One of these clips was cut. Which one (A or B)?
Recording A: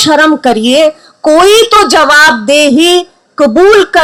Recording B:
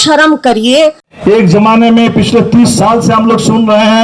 B